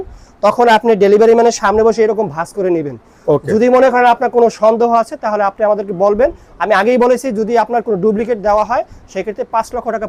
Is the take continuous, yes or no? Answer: yes